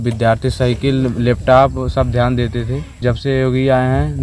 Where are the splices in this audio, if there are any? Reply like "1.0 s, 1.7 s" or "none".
3.0 s